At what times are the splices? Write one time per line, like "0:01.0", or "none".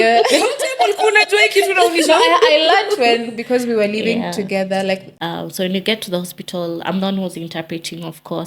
0:05.1